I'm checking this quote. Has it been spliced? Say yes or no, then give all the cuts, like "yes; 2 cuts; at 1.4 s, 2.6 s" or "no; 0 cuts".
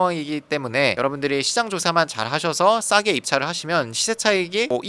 no; 0 cuts